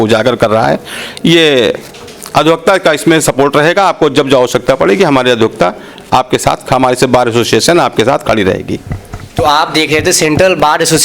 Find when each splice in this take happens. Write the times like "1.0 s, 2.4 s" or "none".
none